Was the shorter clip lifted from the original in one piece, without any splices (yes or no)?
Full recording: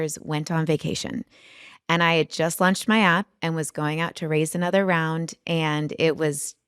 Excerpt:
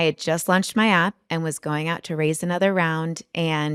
yes